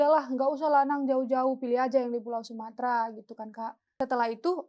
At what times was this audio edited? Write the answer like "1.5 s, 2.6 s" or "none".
3.8 s